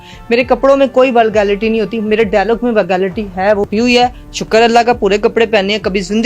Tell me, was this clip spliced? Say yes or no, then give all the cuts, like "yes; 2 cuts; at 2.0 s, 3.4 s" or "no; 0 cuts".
yes; 1 cut; at 3.7 s